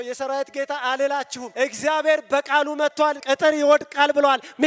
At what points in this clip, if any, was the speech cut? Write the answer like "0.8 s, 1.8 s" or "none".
1.4 s, 3.0 s